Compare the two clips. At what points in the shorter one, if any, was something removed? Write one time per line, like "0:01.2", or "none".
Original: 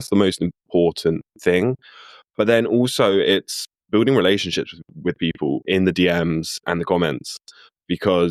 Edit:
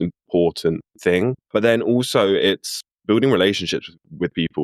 0:01.4